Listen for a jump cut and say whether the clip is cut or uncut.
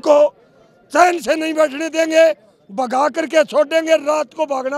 uncut